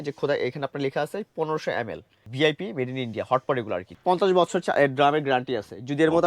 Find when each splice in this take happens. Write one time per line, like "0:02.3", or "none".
0:02.3
0:03.9